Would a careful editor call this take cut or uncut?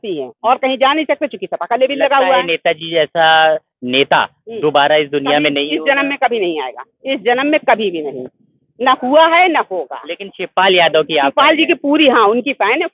uncut